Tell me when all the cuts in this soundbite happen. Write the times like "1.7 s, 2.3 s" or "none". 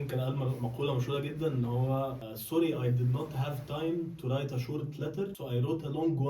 2.3 s, 5.4 s